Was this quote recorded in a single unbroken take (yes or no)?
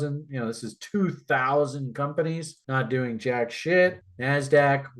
no